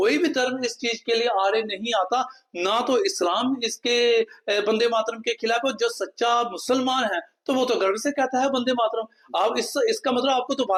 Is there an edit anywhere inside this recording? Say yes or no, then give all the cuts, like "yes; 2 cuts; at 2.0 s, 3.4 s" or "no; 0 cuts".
no; 0 cuts